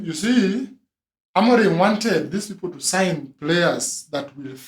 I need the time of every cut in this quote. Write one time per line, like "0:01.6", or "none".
none